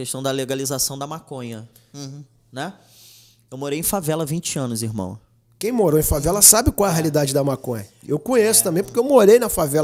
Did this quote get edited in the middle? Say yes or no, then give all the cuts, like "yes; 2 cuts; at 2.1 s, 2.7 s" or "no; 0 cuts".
no; 0 cuts